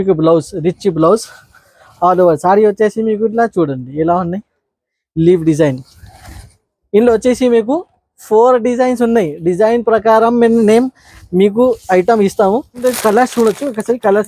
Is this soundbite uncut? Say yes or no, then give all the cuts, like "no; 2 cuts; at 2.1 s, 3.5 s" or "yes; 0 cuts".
no; 1 cut; at 12.7 s